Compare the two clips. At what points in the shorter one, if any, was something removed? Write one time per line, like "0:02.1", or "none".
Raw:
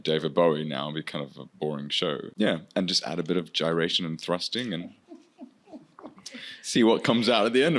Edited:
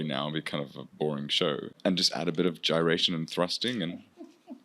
0:01.7